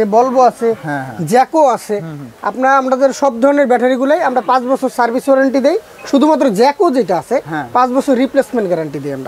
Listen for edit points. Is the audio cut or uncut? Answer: uncut